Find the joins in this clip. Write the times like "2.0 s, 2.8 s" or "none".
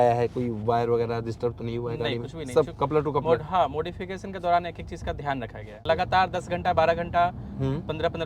5.8 s